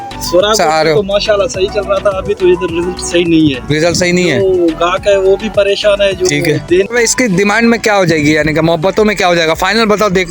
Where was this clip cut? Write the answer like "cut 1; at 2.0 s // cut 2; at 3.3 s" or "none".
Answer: cut 1; at 6.9 s